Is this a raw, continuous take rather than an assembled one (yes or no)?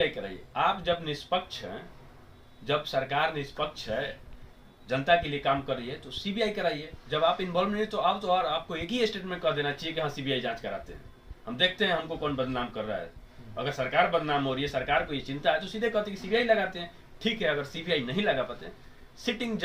yes